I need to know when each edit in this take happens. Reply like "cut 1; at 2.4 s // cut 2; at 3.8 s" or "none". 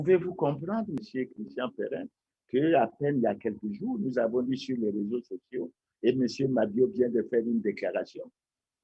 cut 1; at 1.0 s